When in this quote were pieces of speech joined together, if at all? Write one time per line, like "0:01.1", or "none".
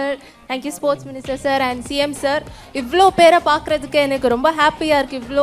none